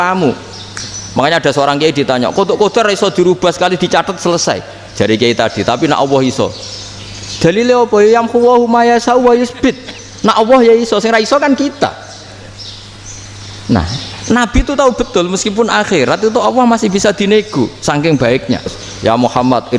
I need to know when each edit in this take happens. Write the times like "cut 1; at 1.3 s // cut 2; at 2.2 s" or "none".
cut 1; at 18.9 s